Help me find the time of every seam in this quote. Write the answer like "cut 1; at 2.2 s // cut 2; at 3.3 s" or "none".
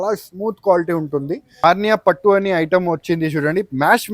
cut 1; at 1.5 s